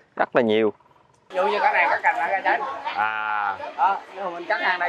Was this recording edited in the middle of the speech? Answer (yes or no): yes